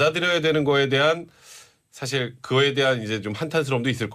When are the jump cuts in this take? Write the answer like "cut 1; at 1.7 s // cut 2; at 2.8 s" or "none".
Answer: cut 1; at 2.0 s